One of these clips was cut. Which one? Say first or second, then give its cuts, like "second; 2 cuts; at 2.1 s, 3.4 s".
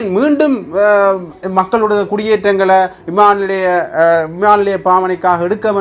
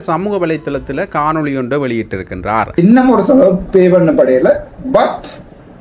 second; 1 cut; at 2.8 s